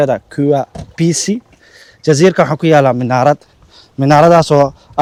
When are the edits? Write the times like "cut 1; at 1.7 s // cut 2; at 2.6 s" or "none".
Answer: none